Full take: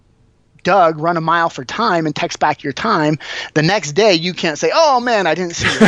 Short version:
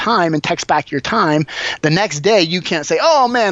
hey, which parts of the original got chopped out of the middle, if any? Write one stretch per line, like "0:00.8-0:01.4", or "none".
none